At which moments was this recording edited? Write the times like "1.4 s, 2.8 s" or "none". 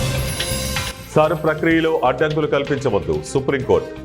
1.0 s